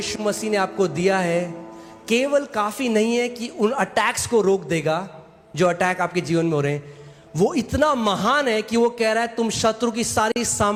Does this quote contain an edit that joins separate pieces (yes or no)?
no